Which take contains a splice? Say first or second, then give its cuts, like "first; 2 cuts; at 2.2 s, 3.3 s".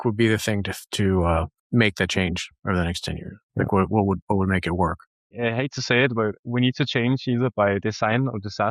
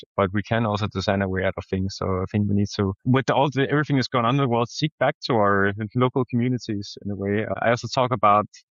first; 2 cuts; at 1.6 s, 5.3 s